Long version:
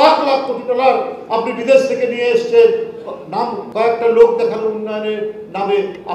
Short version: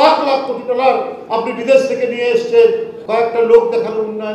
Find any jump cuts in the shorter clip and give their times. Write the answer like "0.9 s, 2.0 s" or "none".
3.0 s